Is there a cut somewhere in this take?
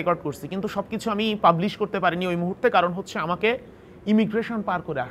no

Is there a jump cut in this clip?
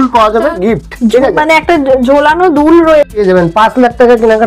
yes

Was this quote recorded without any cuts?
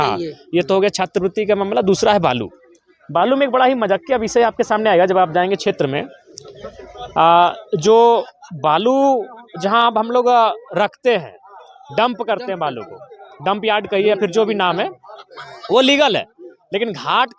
yes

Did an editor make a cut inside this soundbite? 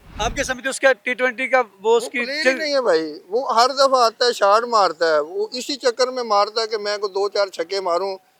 no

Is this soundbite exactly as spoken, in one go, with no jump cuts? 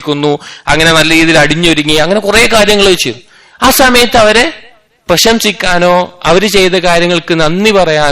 yes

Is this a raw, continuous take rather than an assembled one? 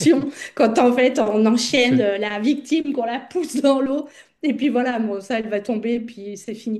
yes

